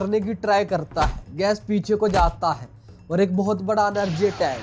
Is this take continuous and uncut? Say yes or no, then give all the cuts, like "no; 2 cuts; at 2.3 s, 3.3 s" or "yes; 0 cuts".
yes; 0 cuts